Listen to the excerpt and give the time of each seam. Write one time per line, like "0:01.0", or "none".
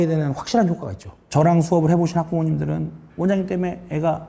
0:01.2